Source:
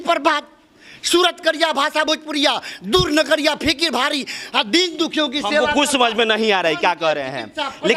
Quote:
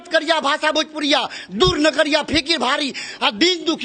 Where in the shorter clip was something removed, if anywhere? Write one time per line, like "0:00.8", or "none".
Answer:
none